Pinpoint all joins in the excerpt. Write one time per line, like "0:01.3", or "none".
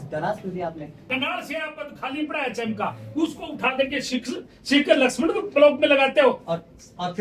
0:01.0